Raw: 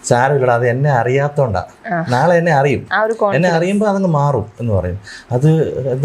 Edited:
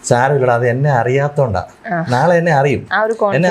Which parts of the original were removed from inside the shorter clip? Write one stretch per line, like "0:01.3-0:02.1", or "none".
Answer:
none

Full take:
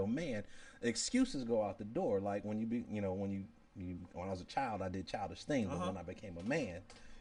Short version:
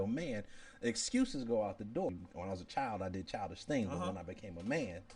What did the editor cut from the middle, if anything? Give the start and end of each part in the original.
0:02.1-0:03.9

